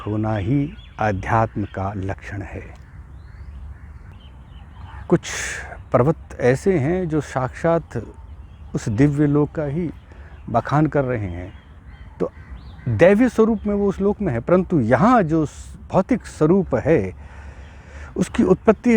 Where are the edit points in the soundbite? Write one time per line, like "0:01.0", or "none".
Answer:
0:04.1